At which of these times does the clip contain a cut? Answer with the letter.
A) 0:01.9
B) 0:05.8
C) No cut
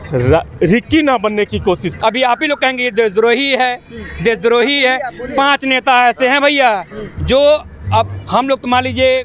A